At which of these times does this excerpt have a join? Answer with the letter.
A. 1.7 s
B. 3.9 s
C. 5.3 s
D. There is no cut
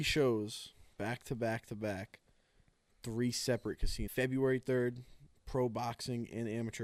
B